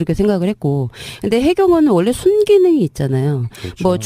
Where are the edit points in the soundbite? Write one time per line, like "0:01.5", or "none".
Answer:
0:01.0